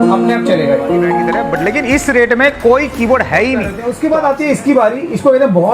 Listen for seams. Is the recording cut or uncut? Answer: cut